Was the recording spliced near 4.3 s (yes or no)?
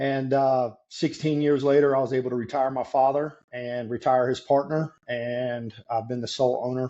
no